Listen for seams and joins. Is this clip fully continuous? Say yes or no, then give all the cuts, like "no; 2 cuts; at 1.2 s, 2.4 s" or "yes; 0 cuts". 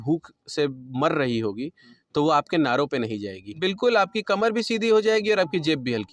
no; 1 cut; at 3.4 s